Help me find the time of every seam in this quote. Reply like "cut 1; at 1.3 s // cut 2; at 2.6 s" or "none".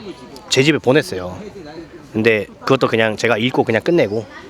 none